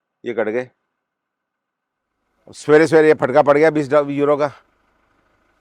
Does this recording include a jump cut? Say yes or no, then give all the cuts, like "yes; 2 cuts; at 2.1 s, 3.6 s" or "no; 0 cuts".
yes; 1 cut; at 2.5 s